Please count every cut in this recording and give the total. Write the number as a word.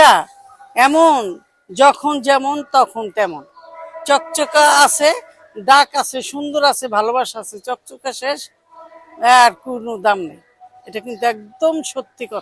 zero